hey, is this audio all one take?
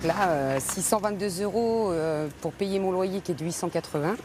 yes; 0 cuts

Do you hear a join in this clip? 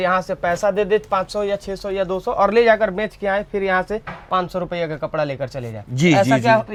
no; 0 cuts

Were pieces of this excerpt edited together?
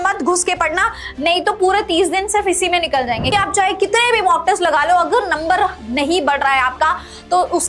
yes; 1 cut; at 3.3 s

